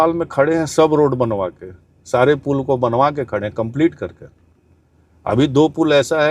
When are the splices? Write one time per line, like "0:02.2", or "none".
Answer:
none